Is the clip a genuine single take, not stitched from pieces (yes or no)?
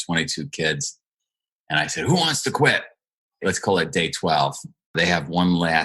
no